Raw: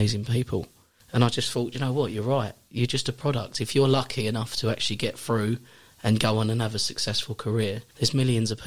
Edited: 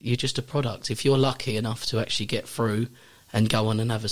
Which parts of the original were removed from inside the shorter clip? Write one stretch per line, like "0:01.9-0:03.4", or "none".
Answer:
none